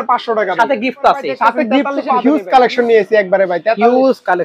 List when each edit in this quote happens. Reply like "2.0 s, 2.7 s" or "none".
2.0 s